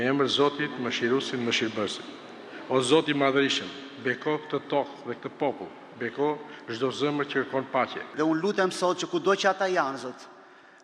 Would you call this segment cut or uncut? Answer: cut